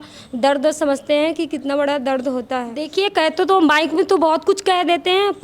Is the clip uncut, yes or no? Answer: no